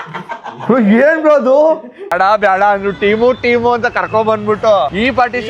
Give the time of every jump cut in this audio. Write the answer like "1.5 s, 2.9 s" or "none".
2.1 s